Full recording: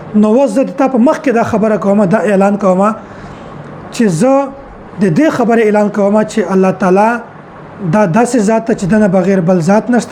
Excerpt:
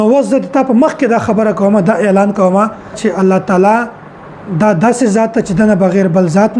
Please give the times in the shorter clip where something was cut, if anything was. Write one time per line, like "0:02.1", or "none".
0:03.0